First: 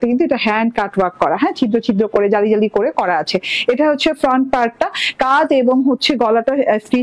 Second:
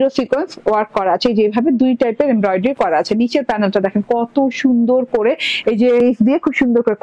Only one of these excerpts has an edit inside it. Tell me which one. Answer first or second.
second